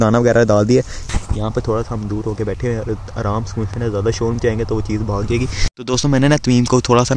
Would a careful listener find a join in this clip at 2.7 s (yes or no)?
no